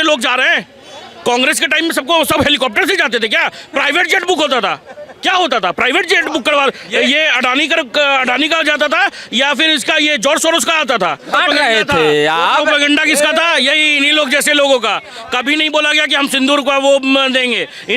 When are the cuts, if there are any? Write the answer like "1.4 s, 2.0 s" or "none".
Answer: 11.3 s

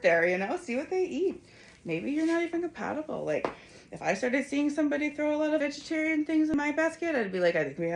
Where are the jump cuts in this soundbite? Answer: 5.6 s, 6.5 s

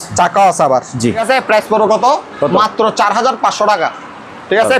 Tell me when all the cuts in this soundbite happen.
1.2 s

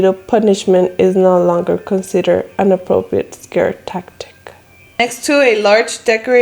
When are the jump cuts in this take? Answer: 5.0 s

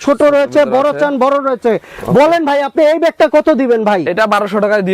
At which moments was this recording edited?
none

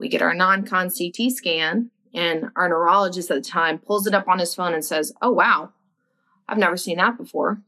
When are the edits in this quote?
none

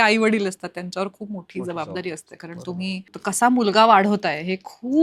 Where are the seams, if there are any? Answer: 3.1 s

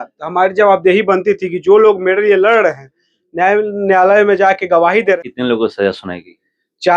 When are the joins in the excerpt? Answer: 5.2 s

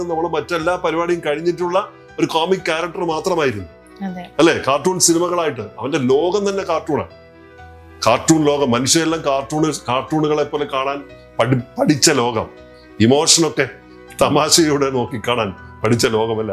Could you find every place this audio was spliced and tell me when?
none

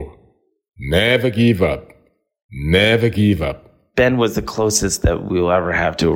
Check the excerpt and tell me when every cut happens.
3.8 s

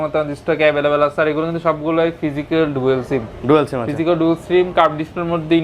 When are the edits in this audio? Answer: none

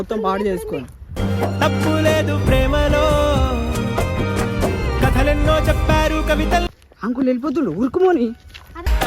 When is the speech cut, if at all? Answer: 5.9 s, 6.8 s

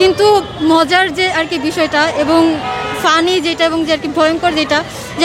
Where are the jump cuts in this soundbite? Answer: none

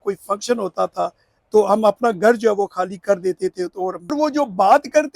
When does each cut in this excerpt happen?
4.1 s

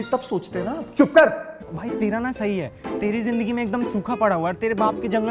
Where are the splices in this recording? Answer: 1.6 s

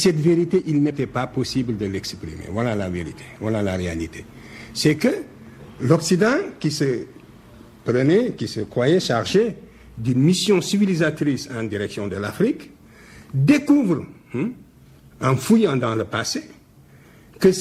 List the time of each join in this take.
none

